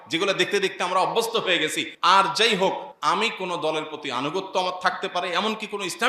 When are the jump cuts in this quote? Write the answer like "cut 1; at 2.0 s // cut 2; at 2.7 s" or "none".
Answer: cut 1; at 1.9 s // cut 2; at 2.9 s